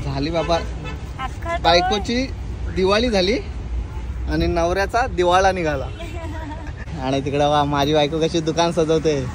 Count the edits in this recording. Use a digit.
1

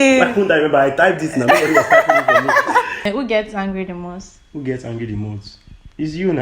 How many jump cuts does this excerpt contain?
1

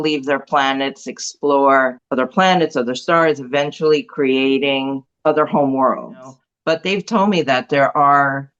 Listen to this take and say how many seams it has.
3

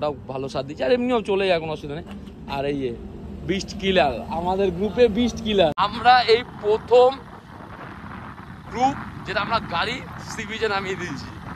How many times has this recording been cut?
1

